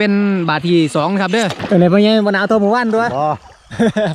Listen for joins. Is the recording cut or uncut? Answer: cut